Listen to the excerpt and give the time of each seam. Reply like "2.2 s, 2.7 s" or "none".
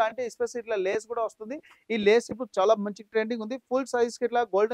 none